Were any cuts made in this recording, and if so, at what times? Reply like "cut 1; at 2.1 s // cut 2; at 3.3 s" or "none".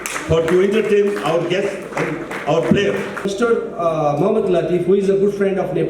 cut 1; at 3.3 s